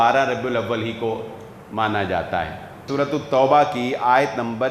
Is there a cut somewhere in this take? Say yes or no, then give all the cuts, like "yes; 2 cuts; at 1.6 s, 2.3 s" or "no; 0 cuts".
yes; 1 cut; at 2.9 s